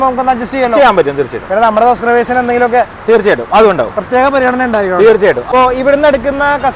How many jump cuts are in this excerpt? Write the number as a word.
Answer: one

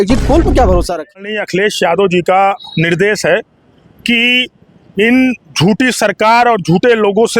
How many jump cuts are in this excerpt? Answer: one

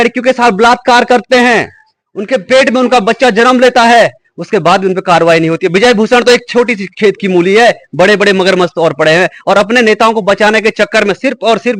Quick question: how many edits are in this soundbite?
zero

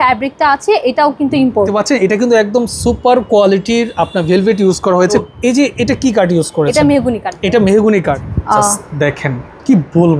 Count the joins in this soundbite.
three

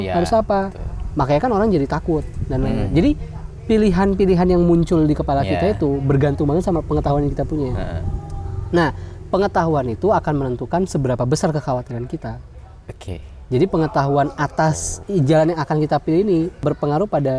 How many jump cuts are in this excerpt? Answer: two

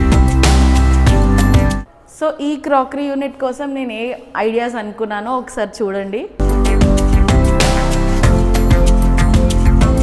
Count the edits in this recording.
one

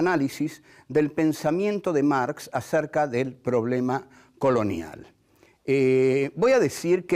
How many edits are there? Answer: one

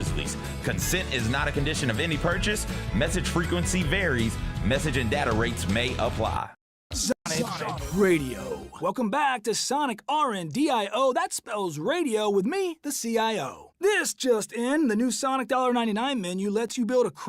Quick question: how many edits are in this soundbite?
one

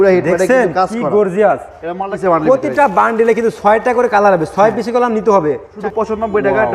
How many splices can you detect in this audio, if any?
two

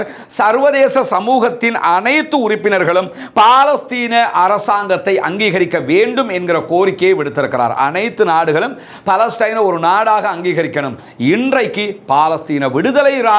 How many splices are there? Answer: one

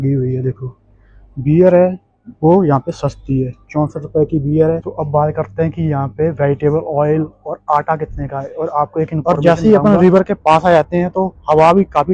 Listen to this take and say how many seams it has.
two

